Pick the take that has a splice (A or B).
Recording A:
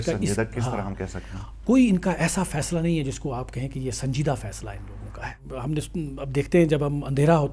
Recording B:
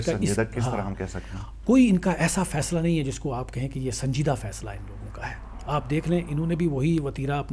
A